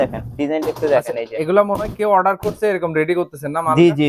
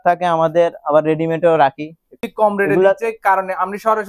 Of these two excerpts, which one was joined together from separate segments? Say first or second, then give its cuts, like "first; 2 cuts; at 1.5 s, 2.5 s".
second; 1 cut; at 2.2 s